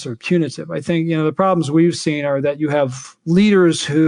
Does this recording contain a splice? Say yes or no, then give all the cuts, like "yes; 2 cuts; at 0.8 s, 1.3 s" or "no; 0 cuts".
no; 0 cuts